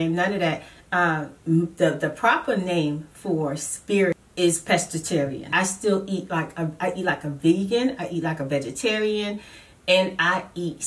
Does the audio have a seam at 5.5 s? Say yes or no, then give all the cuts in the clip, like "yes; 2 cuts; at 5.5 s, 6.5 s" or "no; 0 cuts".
yes; 2 cuts; at 4.2 s, 5.5 s